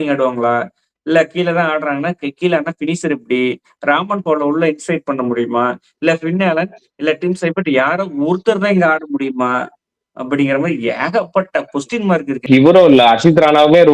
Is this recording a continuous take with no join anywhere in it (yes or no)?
no